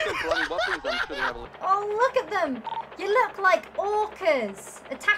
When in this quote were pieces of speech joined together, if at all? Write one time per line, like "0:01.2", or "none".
0:01.4